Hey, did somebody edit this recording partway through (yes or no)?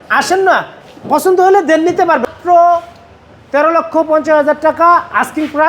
yes